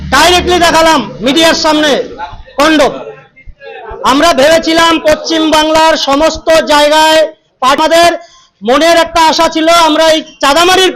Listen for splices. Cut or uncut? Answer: cut